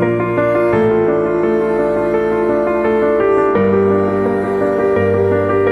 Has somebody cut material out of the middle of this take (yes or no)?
no